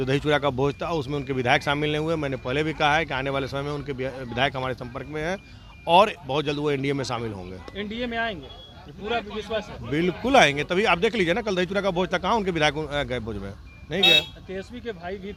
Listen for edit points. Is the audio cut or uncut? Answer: uncut